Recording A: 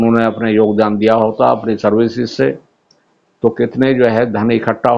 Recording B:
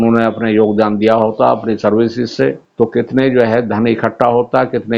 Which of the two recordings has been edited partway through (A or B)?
B